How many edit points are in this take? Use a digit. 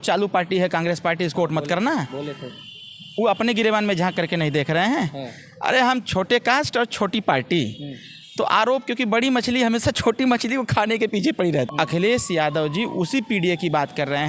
1